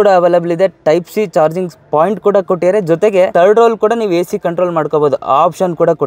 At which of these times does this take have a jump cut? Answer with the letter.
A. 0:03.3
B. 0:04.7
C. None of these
A